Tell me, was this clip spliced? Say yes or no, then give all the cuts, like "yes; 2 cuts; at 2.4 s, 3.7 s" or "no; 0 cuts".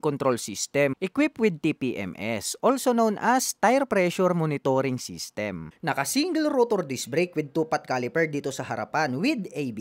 yes; 2 cuts; at 0.9 s, 5.6 s